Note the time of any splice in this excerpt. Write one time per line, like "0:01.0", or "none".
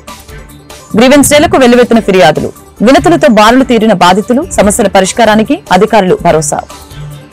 0:00.9